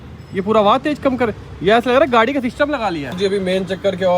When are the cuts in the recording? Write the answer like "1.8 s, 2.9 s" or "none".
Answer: 3.2 s